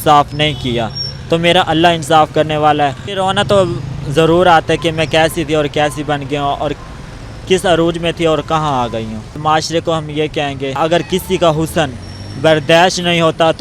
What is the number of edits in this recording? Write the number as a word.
three